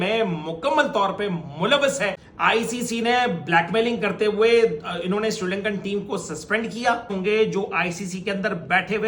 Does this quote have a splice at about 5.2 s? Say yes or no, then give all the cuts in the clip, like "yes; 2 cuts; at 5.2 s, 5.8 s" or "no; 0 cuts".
no; 2 cuts; at 2.3 s, 7.2 s